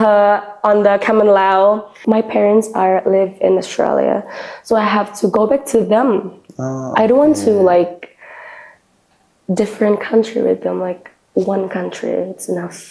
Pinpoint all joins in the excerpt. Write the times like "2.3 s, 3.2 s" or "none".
1.9 s